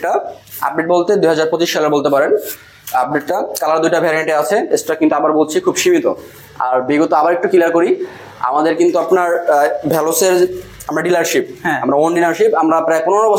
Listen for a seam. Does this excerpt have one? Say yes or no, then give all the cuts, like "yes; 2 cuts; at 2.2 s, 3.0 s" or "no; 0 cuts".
no; 0 cuts